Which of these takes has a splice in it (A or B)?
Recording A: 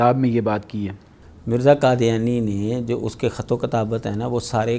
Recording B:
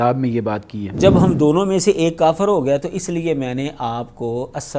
B